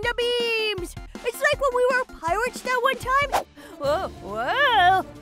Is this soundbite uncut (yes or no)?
no